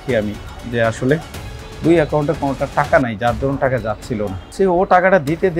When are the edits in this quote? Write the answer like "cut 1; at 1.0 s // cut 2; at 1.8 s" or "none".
cut 1; at 4.5 s